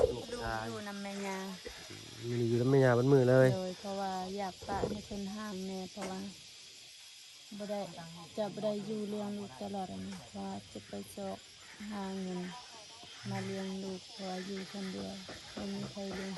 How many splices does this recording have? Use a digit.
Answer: 0